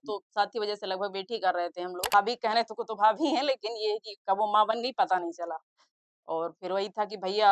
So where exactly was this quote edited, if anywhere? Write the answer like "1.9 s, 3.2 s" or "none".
2.0 s